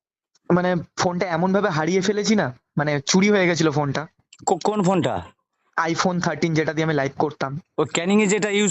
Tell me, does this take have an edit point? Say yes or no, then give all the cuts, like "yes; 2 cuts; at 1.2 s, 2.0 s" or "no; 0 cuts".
no; 0 cuts